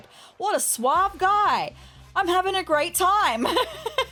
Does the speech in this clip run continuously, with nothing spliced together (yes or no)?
yes